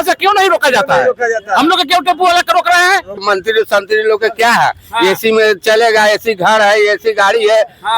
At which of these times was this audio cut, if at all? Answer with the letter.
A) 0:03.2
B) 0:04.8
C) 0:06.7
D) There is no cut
A